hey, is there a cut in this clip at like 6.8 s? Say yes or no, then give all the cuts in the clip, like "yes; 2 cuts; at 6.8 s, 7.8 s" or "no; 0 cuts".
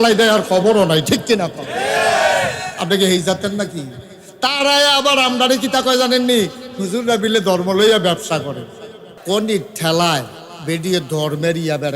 no; 1 cut; at 9.1 s